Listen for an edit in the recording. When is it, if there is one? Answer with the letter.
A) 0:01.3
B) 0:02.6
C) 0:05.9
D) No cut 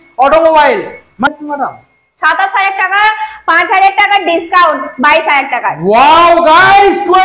A